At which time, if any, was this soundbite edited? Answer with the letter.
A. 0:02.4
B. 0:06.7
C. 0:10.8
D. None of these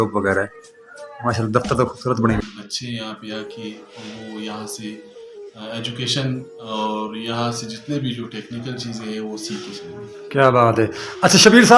A